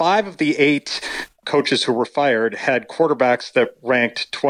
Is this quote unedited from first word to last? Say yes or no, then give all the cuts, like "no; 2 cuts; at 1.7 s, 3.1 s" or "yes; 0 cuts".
no; 1 cut; at 1.4 s